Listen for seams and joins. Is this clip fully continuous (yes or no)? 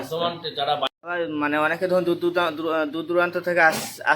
no